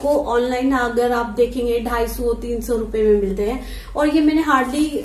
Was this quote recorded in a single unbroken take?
yes; 0 cuts

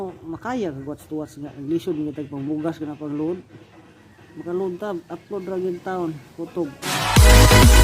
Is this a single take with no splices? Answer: no; 1 cut; at 6.8 s

